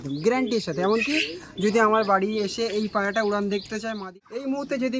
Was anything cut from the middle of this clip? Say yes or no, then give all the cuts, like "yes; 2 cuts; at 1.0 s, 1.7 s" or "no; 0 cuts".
yes; 1 cut; at 4.0 s